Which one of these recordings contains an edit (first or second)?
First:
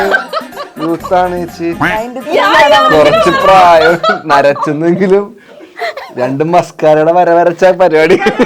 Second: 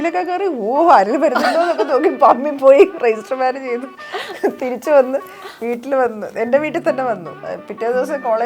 second